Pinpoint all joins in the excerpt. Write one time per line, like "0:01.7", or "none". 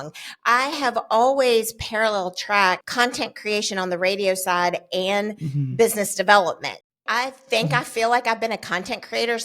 0:06.9